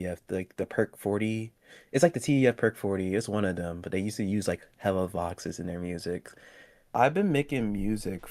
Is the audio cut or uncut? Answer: cut